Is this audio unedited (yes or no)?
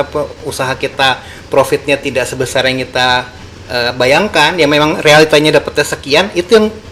yes